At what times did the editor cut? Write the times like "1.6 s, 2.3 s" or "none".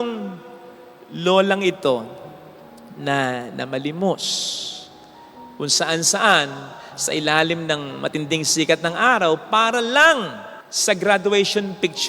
none